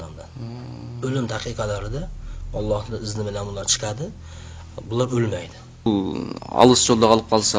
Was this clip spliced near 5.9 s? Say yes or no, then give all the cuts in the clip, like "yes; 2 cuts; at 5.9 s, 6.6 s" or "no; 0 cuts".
yes; 1 cut; at 5.9 s